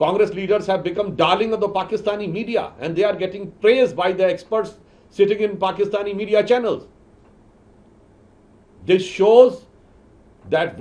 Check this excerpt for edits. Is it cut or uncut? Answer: uncut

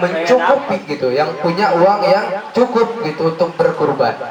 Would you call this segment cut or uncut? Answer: uncut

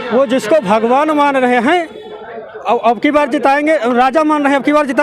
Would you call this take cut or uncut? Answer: uncut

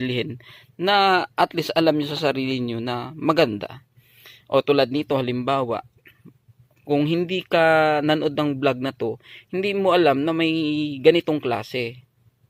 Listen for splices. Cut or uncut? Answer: uncut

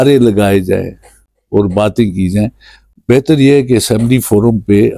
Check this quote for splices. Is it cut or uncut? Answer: uncut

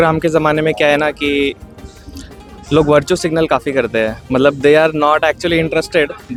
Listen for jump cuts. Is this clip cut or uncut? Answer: uncut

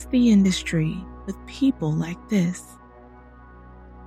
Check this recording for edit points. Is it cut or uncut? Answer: cut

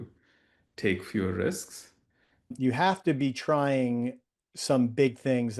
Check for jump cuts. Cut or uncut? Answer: cut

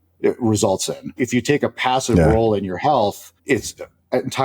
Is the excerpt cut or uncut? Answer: cut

